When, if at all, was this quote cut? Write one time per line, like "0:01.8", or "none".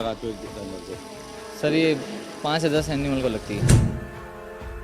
0:03.9